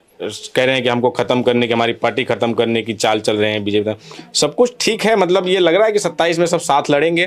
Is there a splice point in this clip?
no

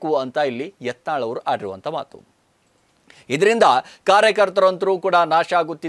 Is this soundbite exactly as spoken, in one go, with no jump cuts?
yes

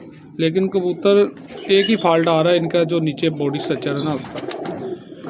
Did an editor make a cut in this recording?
no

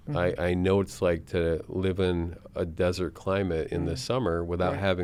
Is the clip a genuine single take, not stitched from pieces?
yes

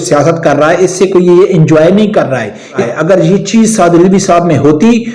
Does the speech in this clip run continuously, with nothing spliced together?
no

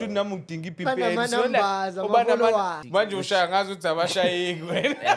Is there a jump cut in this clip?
yes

